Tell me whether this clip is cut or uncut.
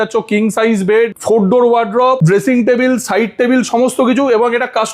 cut